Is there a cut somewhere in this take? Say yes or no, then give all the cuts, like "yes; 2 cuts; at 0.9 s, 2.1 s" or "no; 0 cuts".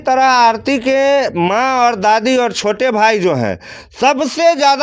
no; 0 cuts